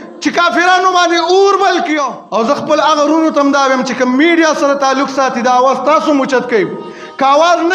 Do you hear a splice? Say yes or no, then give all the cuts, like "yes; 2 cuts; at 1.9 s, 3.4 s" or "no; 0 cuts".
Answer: yes; 1 cut; at 2.1 s